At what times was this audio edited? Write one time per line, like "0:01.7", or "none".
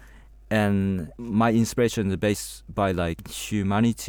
0:01.1
0:03.2